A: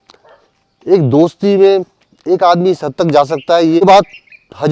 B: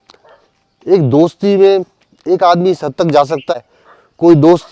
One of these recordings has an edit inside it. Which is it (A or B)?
B